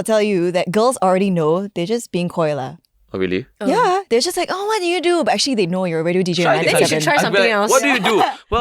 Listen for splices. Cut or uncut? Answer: uncut